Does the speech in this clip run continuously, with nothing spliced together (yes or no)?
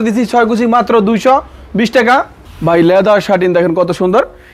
no